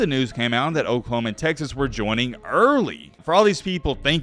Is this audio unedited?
no; 1 cut; at 3.1 s

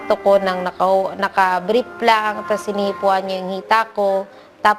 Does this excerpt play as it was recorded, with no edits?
no; 1 cut; at 3.5 s

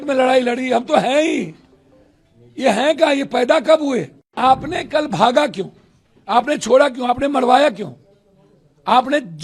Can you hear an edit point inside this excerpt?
yes; 1 cut; at 4.3 s

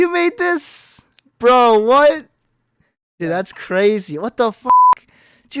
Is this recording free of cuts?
yes; 0 cuts

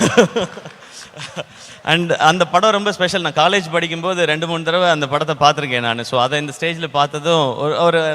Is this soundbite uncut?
yes; 0 cuts

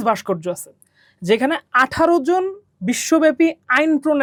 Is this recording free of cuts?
yes; 0 cuts

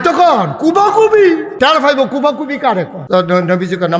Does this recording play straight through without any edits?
no; 2 cuts; at 1.5 s, 3.0 s

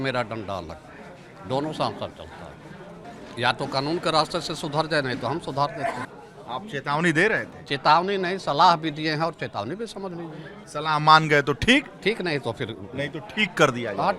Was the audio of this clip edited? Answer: yes; 3 cuts; at 3.0 s, 6.1 s, 10.6 s

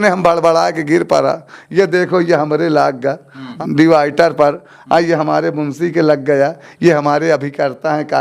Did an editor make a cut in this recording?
yes; 1 cut; at 3.4 s

